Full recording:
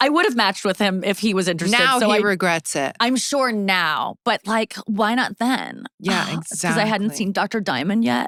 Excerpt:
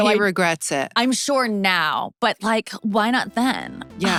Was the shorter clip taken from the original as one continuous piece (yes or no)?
yes